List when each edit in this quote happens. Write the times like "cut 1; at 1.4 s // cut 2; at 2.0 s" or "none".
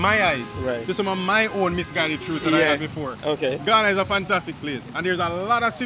none